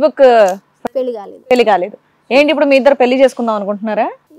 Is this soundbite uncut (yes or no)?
yes